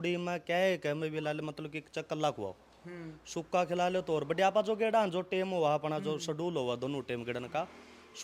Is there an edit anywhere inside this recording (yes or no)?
no